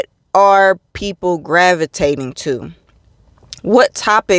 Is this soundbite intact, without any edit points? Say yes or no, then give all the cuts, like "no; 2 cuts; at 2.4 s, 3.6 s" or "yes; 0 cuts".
yes; 0 cuts